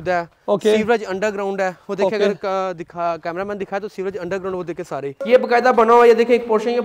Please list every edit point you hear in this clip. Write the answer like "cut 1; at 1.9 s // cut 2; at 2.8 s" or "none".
cut 1; at 5.2 s